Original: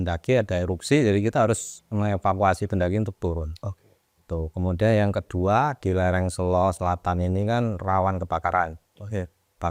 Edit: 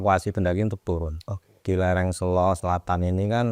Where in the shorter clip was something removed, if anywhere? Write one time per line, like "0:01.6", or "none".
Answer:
0:01.6